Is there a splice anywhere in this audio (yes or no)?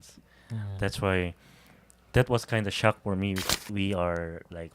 yes